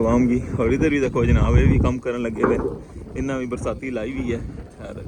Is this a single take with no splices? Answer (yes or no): yes